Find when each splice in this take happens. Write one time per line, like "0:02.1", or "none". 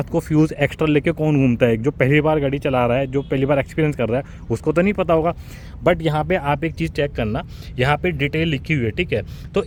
none